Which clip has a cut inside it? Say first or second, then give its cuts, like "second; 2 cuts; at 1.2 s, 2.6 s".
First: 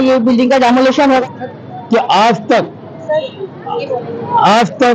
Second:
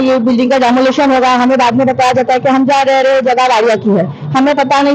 first; 1 cut; at 1.2 s